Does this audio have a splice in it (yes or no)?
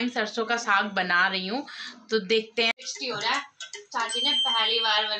yes